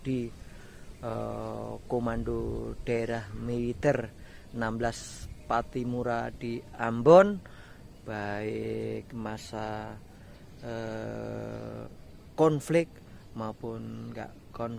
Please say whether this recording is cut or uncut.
uncut